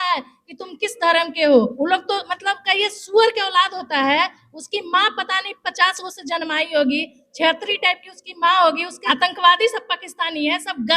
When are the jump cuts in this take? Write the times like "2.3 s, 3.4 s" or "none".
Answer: 1.7 s, 8.9 s